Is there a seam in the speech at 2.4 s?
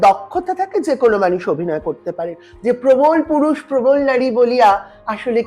yes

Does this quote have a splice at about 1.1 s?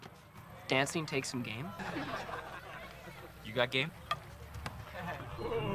no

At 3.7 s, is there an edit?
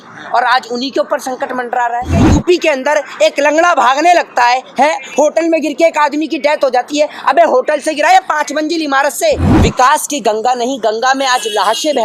no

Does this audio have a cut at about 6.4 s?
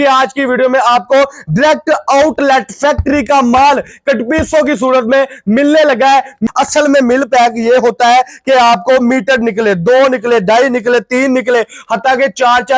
yes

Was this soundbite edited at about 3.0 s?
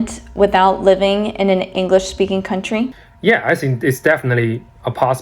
yes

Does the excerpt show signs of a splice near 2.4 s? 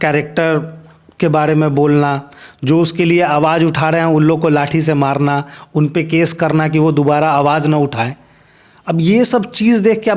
no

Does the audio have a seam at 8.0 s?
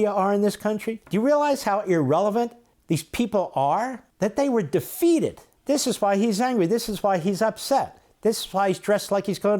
no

